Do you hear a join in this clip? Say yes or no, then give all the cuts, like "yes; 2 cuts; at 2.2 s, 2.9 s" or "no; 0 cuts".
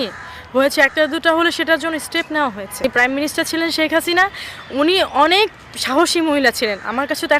yes; 1 cut; at 2.8 s